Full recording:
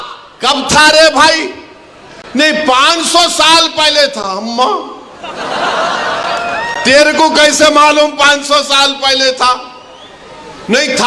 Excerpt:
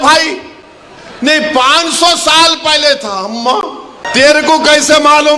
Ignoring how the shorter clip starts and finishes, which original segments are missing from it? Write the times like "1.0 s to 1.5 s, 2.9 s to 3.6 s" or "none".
5.1 s to 6.7 s

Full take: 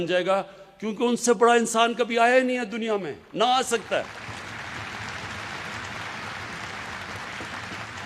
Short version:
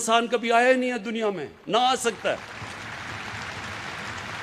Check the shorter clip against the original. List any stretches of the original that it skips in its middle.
none

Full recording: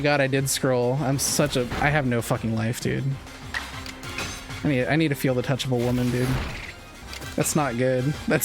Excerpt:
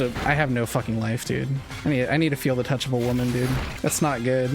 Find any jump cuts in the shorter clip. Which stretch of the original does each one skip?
3.2 s to 4.4 s, 6.5 s to 7.2 s

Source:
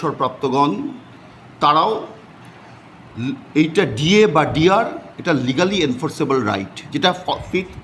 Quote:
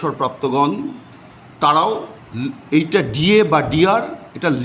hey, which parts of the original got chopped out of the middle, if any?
2.2 s to 3.0 s

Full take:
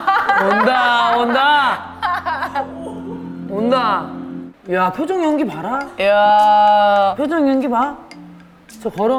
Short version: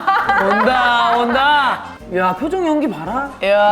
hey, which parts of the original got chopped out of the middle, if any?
1.9 s to 4.5 s

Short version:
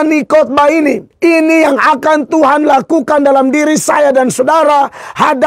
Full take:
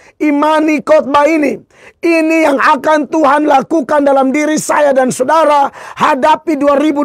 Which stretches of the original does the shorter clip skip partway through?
1.6 s to 1.9 s

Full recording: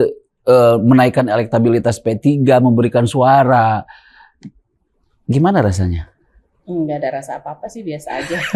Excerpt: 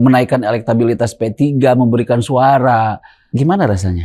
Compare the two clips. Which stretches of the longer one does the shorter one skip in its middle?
4.0 s to 5.1 s

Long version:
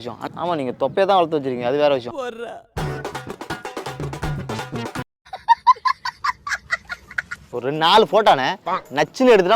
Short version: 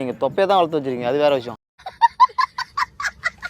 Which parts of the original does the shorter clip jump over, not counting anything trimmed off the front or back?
2.2 s to 5.1 s

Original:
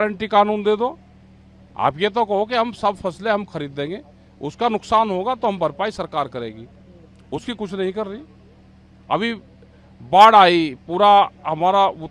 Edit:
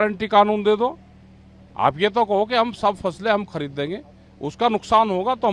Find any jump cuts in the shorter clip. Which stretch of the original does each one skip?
none

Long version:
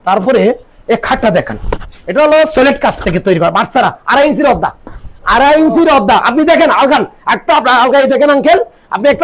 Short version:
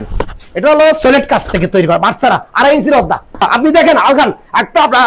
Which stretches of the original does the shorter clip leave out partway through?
5.0 s to 6.2 s

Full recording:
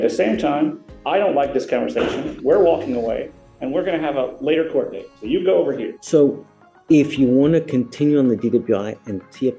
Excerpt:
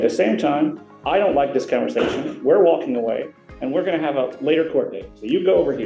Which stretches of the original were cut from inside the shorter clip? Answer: none

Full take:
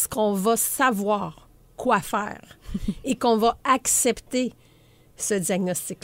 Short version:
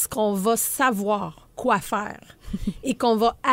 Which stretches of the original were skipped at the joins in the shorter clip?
1.4 s to 1.6 s

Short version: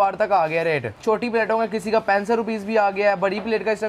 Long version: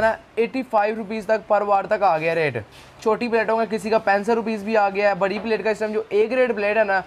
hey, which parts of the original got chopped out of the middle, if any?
2.6 s to 2.9 s

